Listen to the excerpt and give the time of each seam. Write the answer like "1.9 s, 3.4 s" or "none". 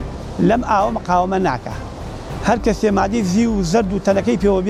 none